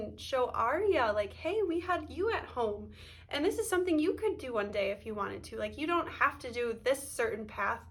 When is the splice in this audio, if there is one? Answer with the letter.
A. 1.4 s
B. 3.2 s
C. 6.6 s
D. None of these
D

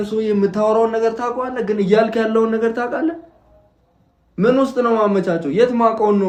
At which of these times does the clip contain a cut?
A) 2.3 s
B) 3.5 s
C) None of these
C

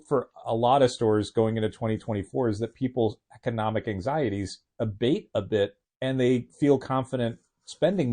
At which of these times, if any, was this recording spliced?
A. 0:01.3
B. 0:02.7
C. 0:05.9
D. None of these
C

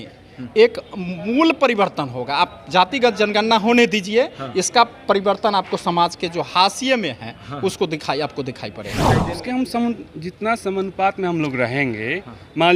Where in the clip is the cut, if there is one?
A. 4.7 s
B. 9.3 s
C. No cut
B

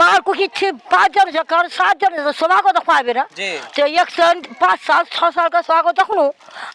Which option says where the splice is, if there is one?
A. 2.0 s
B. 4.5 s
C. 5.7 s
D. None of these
D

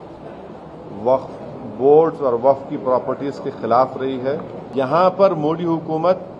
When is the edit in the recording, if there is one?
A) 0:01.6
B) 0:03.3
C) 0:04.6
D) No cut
C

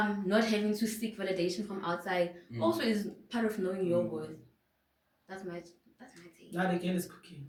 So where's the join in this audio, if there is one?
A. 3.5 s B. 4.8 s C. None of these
C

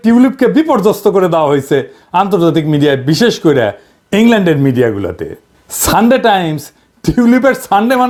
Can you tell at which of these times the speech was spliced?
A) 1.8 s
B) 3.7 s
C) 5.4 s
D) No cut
D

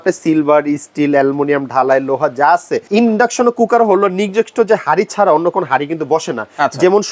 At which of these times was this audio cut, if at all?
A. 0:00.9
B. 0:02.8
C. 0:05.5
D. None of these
B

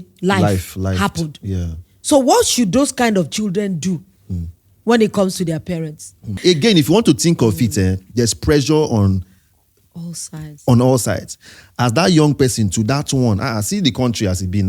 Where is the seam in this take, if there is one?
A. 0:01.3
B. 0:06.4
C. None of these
B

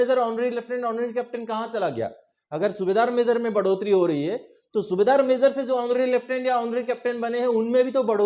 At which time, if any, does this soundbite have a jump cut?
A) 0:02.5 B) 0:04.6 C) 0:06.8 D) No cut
D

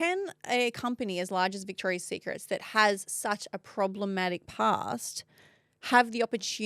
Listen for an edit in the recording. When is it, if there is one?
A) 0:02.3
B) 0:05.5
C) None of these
C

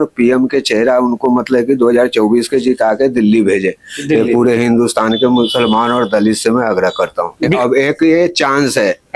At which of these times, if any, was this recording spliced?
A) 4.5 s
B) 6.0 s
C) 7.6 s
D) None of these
C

